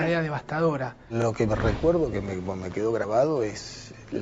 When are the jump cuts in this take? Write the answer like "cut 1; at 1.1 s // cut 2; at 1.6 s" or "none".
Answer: cut 1; at 0.9 s